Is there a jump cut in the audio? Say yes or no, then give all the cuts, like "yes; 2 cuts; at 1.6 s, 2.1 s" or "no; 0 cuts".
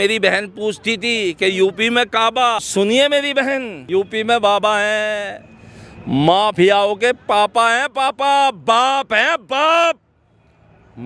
yes; 2 cuts; at 2.7 s, 3.7 s